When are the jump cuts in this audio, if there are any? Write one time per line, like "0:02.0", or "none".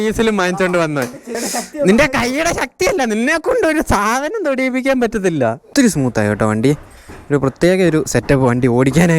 0:01.3
0:05.6